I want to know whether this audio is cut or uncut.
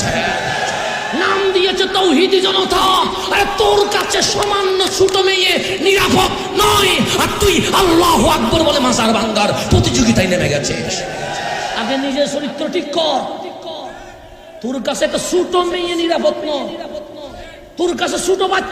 uncut